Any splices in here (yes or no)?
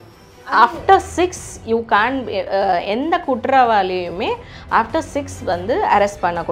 no